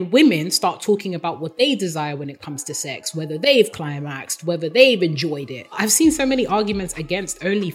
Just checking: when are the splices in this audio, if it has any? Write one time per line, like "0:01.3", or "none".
0:05.8